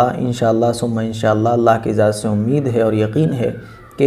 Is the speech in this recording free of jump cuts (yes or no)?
yes